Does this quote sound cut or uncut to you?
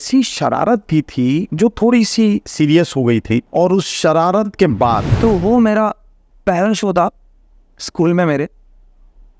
cut